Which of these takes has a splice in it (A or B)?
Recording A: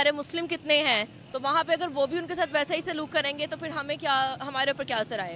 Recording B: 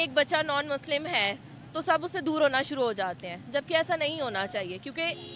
B